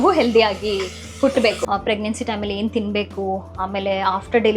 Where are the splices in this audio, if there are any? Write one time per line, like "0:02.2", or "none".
0:01.6